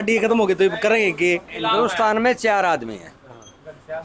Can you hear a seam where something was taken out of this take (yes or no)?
yes